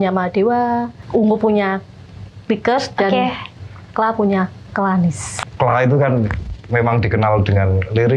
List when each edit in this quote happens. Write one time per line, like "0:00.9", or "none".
0:01.0
0:05.3